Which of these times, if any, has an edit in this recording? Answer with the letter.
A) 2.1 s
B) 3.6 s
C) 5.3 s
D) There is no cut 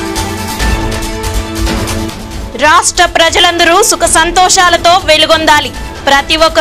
D